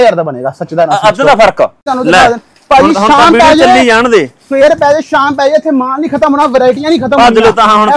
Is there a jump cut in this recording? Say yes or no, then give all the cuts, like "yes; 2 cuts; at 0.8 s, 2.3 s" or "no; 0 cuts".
yes; 1 cut; at 1.8 s